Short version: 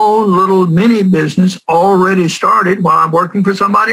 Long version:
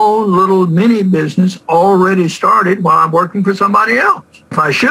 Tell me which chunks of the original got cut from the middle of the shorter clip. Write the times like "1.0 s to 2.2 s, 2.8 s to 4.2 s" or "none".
none